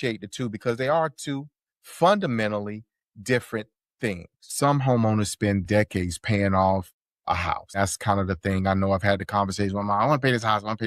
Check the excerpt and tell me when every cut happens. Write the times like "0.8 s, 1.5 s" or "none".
4.5 s